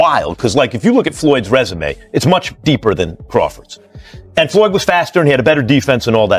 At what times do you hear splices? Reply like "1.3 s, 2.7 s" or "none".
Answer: none